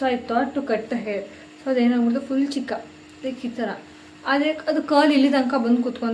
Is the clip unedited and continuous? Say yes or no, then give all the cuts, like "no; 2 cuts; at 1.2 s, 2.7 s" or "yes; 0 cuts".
yes; 0 cuts